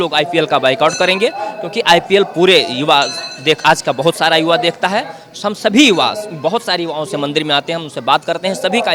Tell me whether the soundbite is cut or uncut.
uncut